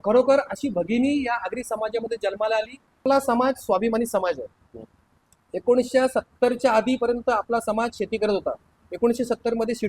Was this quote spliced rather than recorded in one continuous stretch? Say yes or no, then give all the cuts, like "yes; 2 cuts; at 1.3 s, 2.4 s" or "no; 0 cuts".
yes; 1 cut; at 3.0 s